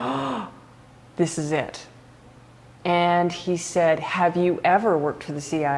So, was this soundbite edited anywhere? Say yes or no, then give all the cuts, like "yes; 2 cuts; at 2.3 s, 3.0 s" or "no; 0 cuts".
no; 0 cuts